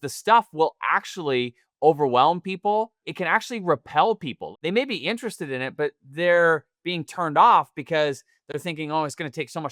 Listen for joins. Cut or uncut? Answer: cut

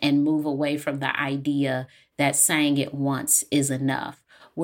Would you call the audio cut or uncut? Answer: uncut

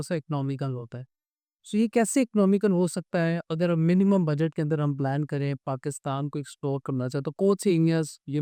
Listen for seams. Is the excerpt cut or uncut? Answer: uncut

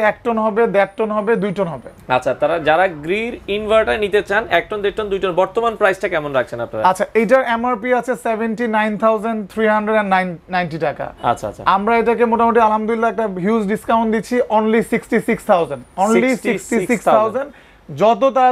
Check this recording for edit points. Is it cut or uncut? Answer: uncut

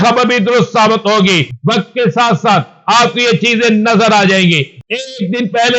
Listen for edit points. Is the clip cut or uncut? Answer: cut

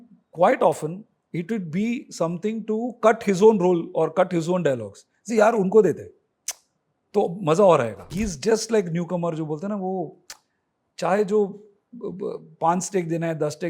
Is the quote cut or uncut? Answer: cut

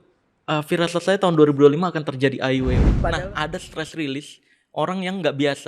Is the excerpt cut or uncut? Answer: cut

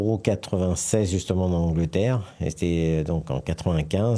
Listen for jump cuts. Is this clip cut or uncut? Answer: uncut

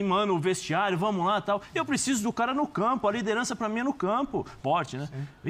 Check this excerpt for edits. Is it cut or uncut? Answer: cut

